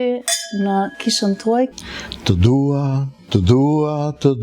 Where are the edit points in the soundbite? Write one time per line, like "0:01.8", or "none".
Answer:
0:01.7